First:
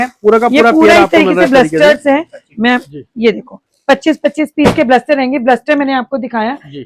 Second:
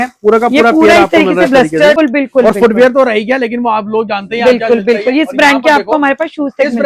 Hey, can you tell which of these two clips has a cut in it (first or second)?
second